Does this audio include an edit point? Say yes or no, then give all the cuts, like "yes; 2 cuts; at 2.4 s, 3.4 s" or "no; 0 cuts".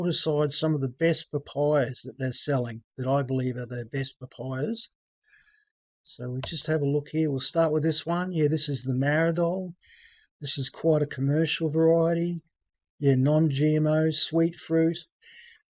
no; 0 cuts